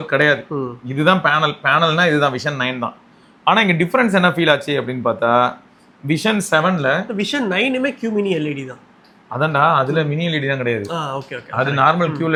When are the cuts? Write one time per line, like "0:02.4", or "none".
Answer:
none